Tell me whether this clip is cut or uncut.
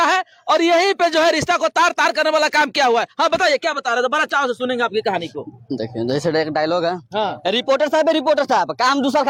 uncut